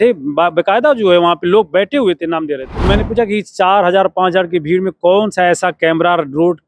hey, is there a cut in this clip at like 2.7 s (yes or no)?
yes